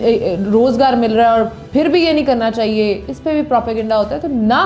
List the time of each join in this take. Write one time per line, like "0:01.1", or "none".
none